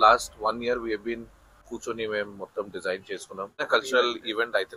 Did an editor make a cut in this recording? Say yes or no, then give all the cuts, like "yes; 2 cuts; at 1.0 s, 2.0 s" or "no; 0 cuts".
yes; 2 cuts; at 1.7 s, 3.7 s